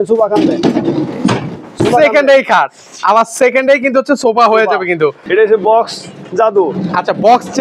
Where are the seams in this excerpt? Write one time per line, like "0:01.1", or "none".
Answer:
0:05.2